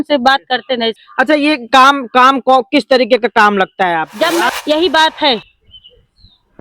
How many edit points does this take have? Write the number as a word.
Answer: two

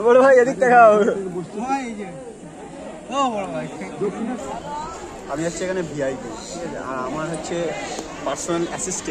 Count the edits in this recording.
one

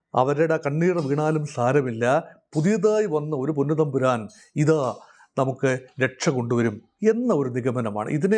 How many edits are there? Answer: zero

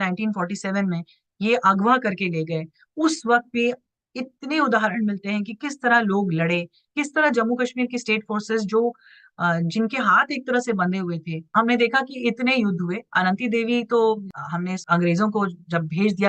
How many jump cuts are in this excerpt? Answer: two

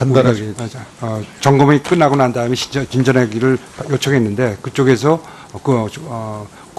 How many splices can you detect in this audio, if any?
one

